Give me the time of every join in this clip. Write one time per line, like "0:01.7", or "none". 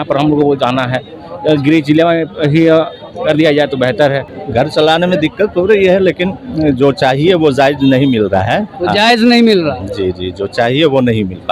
0:04.4